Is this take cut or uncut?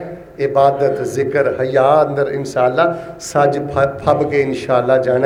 uncut